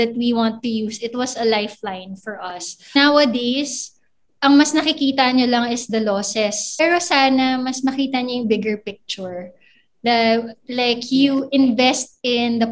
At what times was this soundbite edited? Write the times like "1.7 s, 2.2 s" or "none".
3.0 s, 6.8 s

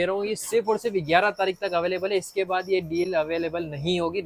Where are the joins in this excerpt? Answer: none

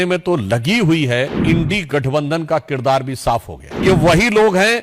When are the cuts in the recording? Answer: 1.4 s, 3.8 s

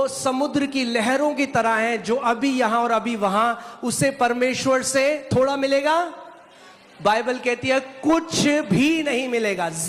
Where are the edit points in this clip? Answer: none

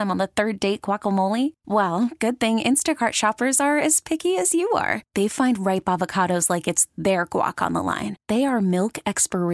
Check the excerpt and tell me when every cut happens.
none

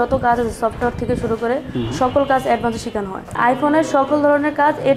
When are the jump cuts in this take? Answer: 3.3 s

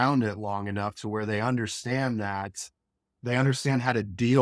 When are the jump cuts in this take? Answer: none

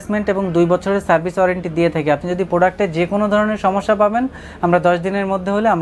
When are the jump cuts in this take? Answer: none

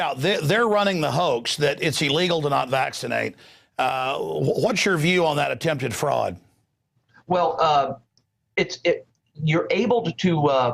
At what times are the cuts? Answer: 9.8 s

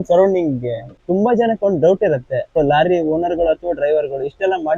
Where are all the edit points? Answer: 1.0 s, 2.6 s

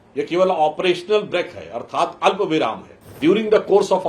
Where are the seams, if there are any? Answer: 3.2 s

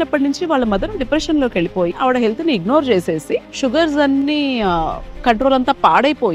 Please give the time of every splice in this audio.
2.0 s

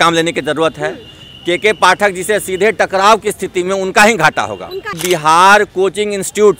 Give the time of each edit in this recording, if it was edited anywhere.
4.9 s

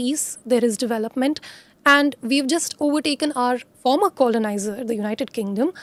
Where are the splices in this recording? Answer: none

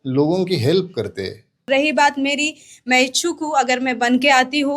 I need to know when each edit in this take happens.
1.7 s

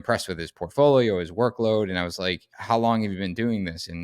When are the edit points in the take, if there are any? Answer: 2.5 s

